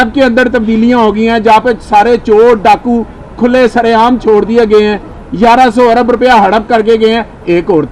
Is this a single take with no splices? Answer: yes; 0 cuts

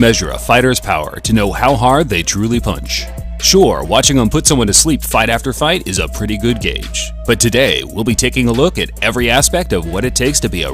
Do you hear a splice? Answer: yes; 1 cut; at 6.1 s

